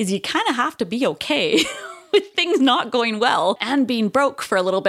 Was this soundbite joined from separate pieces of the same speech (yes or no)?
yes